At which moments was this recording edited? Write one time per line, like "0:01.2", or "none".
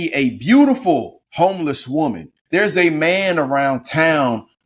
0:01.2
0:02.3